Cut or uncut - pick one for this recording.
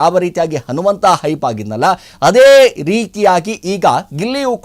uncut